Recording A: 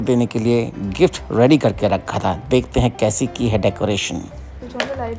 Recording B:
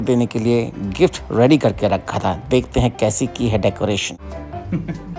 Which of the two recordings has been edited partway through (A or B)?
B